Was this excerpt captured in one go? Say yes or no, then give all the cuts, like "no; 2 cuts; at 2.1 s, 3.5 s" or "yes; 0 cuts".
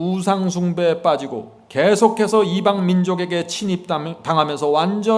yes; 0 cuts